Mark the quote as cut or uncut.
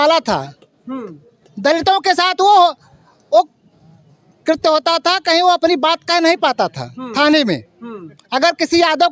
uncut